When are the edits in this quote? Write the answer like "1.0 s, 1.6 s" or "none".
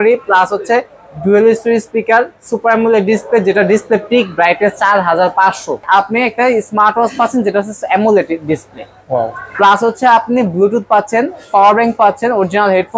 5.8 s